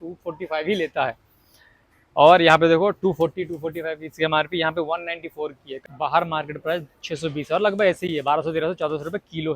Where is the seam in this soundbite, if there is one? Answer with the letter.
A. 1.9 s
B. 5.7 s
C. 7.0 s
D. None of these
B